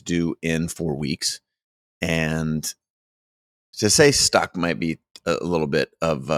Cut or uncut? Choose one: uncut